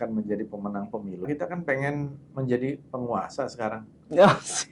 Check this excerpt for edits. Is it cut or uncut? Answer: cut